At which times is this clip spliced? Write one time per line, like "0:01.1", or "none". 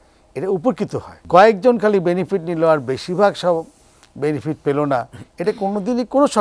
0:01.1